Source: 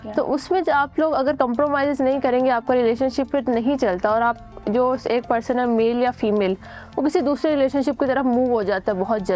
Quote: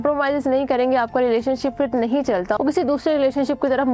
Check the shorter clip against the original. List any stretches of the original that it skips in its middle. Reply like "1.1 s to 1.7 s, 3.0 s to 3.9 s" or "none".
4.1 s to 6.9 s